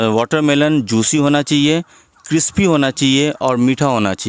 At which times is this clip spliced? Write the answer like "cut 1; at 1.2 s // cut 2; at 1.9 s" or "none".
none